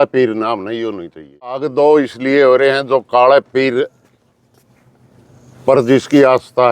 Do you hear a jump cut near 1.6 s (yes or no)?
yes